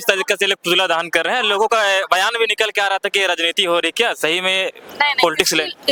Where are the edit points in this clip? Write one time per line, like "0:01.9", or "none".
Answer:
none